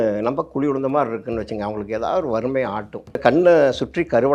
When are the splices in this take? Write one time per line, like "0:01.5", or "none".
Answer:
0:03.2